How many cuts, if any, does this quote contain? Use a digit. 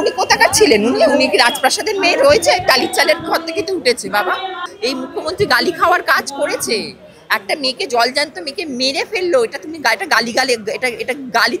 1